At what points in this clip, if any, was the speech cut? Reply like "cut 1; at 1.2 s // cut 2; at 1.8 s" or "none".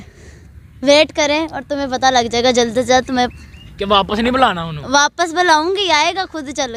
none